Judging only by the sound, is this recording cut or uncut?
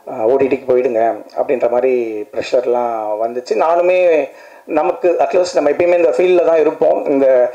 uncut